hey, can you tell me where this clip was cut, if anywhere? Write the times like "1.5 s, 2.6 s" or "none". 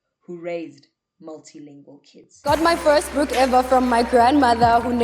2.3 s